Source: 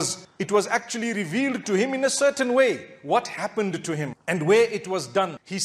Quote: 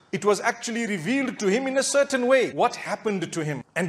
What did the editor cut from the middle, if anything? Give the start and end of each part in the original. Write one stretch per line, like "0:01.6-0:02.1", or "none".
0:02.8-0:03.0